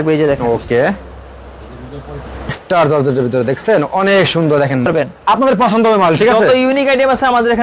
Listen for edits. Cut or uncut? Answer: cut